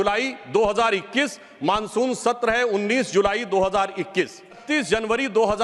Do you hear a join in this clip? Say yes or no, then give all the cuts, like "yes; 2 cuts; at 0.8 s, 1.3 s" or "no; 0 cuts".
yes; 1 cut; at 4.6 s